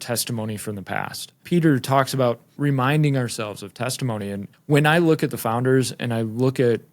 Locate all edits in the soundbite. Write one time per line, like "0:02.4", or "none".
0:01.4
0:02.5
0:04.5